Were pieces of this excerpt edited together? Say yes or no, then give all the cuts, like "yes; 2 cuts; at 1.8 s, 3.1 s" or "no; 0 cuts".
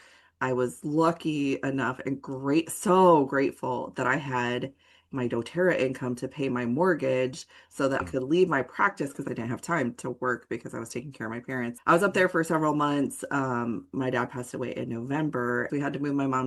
yes; 4 cuts; at 8.0 s, 9.3 s, 11.8 s, 15.7 s